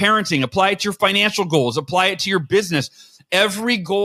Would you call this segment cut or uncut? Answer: uncut